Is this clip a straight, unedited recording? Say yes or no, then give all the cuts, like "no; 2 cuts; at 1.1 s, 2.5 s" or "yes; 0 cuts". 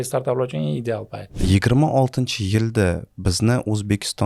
no; 1 cut; at 1.3 s